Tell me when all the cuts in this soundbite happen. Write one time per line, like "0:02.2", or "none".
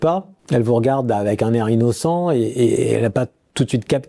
none